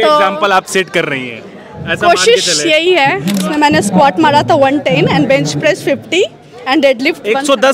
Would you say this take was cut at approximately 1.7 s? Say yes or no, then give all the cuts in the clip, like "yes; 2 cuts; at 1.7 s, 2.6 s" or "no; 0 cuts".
no; 1 cut; at 3.4 s